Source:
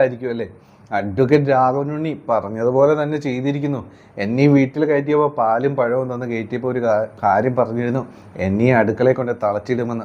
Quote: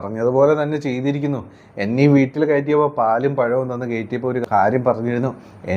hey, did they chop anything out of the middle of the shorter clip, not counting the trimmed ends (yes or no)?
yes